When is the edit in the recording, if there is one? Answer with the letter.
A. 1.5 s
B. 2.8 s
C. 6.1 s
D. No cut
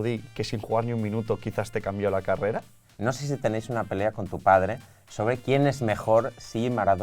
B